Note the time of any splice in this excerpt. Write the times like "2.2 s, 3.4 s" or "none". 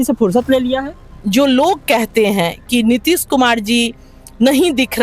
1.1 s

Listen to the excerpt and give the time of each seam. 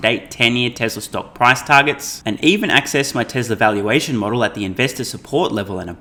none

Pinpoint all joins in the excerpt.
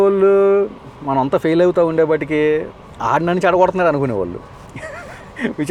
none

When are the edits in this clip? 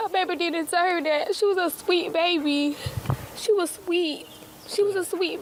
none

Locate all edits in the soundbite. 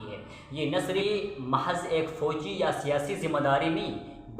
1.0 s

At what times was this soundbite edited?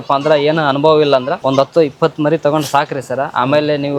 1.3 s

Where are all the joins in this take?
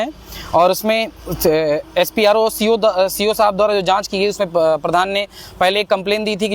none

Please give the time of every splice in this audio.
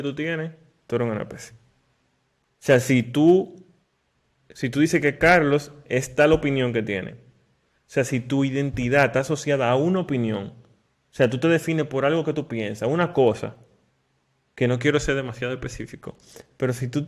none

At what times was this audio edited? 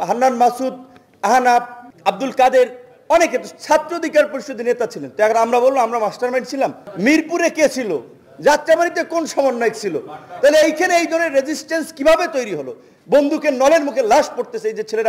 1.8 s, 6.9 s

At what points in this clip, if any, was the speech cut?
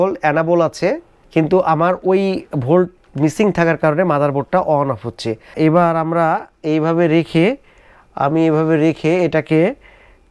1.1 s, 5.5 s

